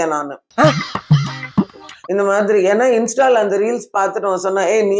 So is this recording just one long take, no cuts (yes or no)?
no